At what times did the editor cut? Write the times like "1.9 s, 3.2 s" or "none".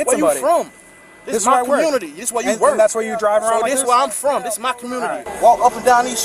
5.3 s